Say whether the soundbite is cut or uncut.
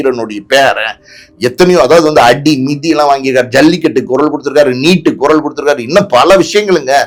uncut